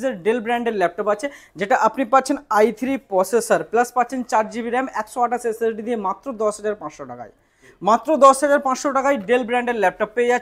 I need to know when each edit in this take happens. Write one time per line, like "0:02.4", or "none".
none